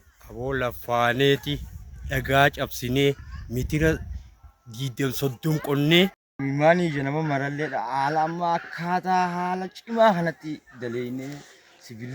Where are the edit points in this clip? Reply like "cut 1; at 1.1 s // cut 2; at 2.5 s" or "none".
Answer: cut 1; at 6.3 s